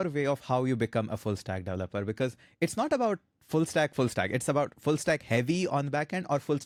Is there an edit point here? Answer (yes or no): no